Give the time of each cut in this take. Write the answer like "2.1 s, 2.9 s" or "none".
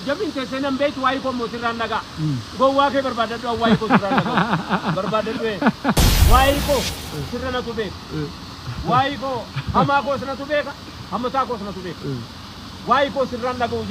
6.1 s